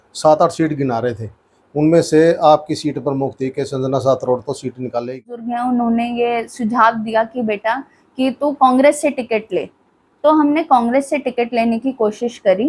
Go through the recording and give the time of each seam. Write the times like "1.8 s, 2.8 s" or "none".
5.5 s